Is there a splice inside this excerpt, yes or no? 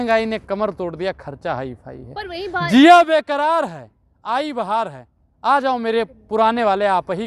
no